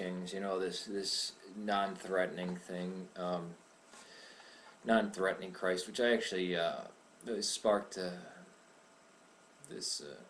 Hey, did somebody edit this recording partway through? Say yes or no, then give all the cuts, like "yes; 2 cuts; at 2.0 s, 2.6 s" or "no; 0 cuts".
yes; 1 cut; at 2.6 s